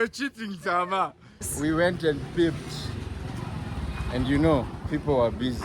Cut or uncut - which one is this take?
cut